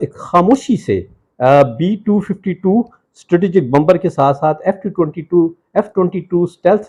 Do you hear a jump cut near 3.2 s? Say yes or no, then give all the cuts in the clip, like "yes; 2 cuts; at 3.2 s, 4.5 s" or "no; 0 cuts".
no; 0 cuts